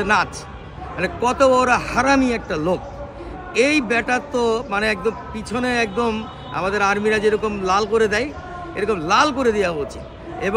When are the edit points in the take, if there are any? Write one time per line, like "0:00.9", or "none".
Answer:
none